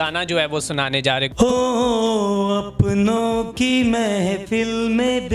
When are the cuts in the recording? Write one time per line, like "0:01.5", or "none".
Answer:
0:01.3